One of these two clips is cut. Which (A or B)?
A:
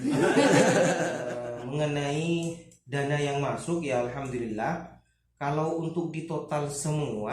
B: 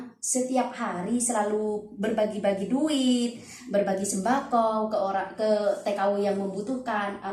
A